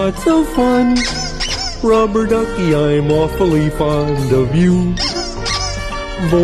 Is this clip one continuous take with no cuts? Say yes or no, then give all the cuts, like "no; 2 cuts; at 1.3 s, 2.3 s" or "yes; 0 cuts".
yes; 0 cuts